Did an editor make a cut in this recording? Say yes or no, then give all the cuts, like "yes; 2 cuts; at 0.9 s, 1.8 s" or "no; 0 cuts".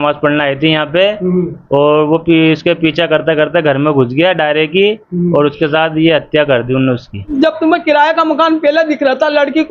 yes; 1 cut; at 7.3 s